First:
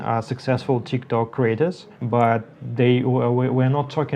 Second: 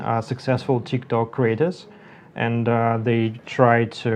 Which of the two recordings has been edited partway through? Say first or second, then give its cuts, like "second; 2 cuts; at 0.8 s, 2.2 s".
first; 1 cut; at 1.9 s